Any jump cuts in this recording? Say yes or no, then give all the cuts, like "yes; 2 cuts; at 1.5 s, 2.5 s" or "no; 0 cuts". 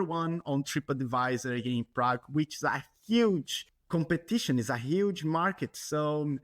no; 0 cuts